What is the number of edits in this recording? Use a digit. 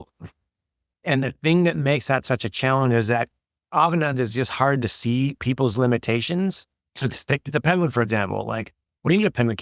1